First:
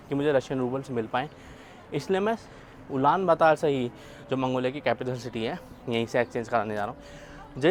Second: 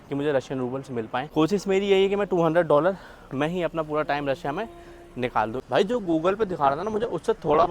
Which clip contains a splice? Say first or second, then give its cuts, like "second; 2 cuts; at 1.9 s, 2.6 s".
second; 2 cuts; at 1.3 s, 5.6 s